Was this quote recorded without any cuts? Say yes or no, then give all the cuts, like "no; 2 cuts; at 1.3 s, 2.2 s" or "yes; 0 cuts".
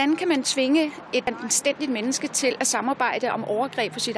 yes; 0 cuts